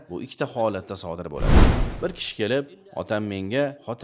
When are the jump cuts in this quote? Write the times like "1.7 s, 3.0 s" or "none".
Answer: 1.8 s